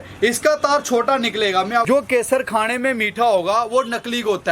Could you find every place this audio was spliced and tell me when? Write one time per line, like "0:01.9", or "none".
0:01.8